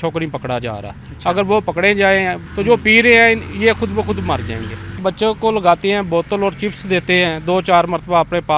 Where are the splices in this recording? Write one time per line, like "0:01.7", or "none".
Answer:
0:02.4
0:05.0